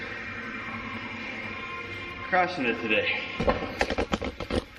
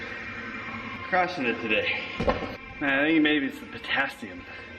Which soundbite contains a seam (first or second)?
second